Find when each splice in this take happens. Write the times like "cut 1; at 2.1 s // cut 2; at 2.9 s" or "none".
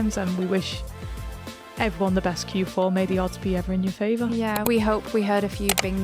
cut 1; at 4.6 s